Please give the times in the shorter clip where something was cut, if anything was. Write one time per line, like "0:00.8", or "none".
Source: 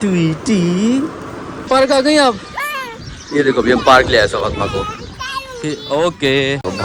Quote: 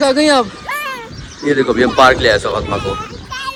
none